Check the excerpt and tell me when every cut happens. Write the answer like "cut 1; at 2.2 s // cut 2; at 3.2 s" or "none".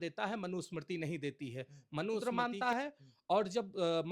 cut 1; at 2.2 s